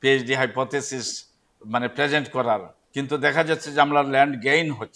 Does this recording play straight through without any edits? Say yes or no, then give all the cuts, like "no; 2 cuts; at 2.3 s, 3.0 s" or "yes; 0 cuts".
no; 1 cut; at 2.8 s